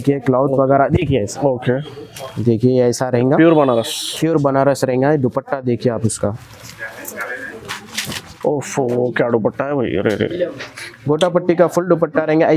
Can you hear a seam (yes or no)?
no